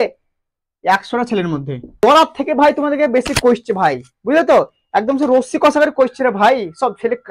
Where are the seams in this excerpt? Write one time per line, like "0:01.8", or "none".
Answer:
0:01.9